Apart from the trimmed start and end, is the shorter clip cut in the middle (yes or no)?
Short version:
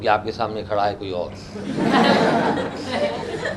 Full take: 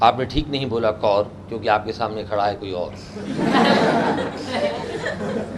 no